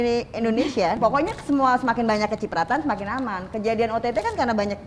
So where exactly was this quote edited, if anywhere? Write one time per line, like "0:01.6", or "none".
0:01.0